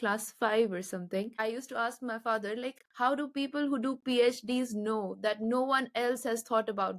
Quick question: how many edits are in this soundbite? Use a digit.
2